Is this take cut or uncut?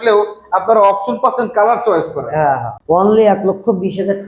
cut